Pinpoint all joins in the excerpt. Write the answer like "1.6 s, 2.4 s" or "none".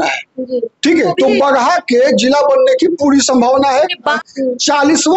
1.1 s, 4.2 s